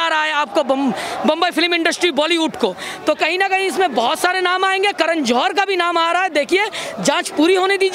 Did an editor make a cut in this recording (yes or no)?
no